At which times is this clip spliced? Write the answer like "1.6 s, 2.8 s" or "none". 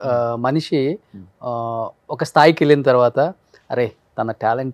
none